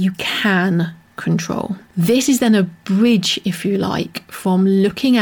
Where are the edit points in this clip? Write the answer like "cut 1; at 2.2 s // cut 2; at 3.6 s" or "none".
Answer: cut 1; at 1.8 s